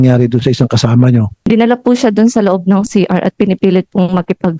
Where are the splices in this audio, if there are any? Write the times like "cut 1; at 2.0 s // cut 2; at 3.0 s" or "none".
cut 1; at 1.4 s